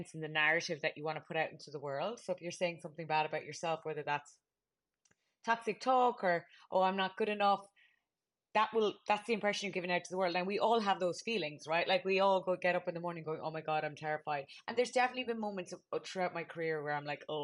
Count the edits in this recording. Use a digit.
0